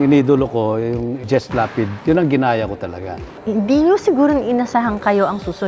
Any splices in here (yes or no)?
yes